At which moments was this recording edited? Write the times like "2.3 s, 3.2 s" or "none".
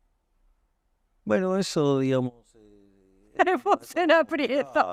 none